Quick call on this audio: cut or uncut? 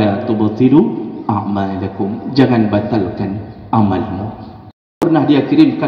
cut